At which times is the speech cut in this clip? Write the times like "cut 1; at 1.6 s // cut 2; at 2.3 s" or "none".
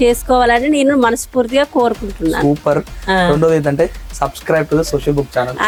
none

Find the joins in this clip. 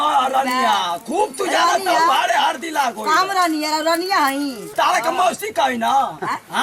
cut 1; at 4.7 s

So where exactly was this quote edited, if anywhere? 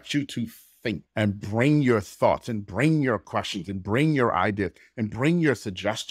cut 1; at 1.1 s

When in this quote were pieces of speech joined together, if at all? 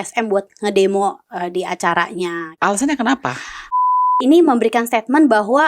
cut 1; at 2.4 s // cut 2; at 3.7 s

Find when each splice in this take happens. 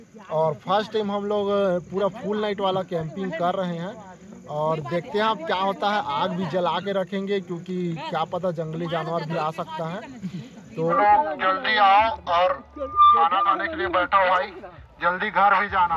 cut 1; at 10.9 s

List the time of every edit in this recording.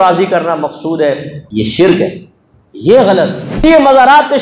cut 1; at 1.4 s // cut 2; at 3.5 s

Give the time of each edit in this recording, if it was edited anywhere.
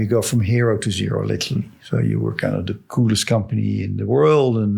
cut 1; at 2.8 s

